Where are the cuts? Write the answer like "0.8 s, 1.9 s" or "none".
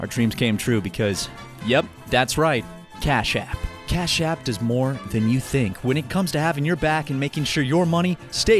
3.8 s

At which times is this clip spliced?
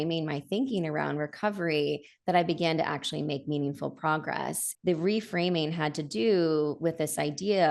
4.6 s

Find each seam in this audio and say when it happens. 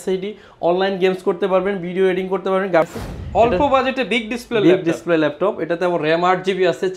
2.9 s

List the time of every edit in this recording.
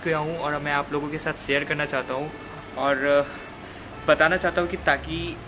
none

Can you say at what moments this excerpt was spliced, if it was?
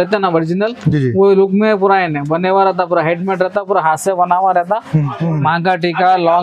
5.1 s

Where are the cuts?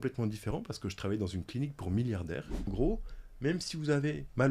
2.7 s

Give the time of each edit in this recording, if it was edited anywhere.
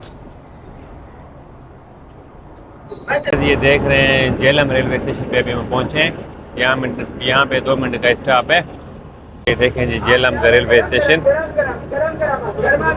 3.3 s, 9.4 s

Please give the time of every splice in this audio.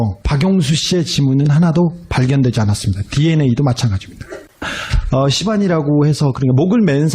1.0 s

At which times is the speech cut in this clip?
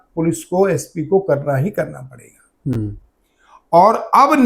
none

